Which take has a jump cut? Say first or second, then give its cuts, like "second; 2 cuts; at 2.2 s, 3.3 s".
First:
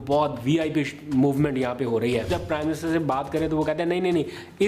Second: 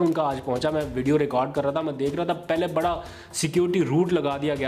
first; 1 cut; at 2.3 s